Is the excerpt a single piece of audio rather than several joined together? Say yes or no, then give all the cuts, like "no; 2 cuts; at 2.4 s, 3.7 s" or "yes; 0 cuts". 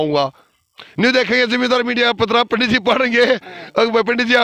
yes; 0 cuts